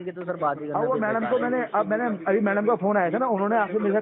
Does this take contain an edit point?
no; 0 cuts

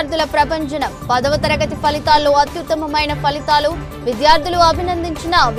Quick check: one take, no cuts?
yes; 0 cuts

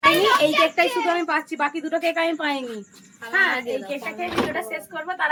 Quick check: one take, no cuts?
yes; 0 cuts

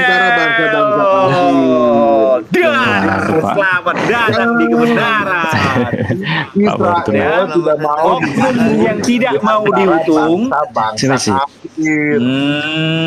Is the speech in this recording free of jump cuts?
yes; 0 cuts

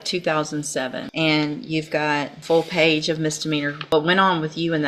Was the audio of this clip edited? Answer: yes; 3 cuts; at 1.1 s, 2.3 s, 3.8 s

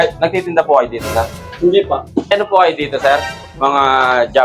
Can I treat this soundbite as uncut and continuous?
no; 2 cuts; at 1.4 s, 2.3 s

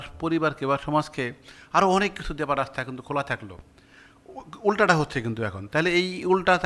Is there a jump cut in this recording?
no; 0 cuts

